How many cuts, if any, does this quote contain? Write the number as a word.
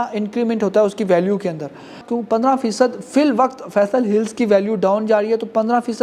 one